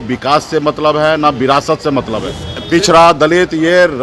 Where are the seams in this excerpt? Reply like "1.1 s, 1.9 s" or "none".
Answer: 2.5 s